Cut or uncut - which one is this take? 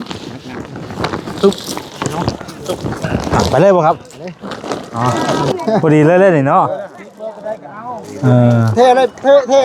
cut